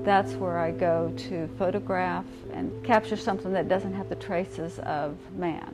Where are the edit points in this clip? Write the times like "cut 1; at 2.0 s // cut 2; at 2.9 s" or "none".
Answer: cut 1; at 2.7 s